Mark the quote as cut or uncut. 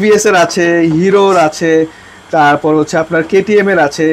uncut